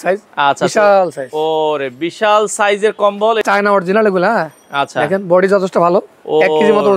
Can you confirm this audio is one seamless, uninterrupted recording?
no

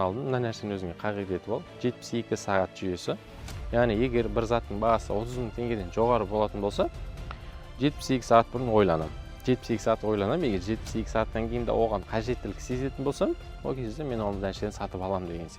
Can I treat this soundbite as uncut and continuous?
yes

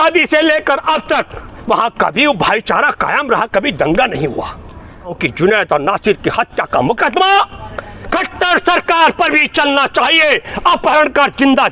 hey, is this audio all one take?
no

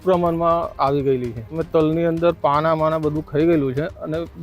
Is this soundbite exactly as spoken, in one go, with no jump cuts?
no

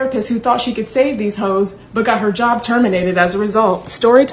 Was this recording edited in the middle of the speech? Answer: no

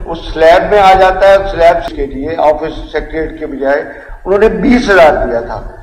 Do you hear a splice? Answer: yes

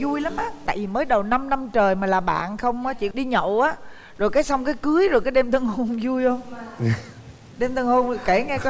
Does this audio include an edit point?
no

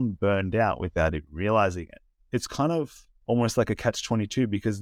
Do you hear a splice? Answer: yes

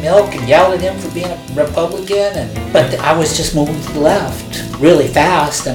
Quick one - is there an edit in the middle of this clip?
yes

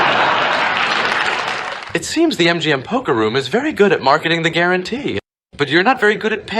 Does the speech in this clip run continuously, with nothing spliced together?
no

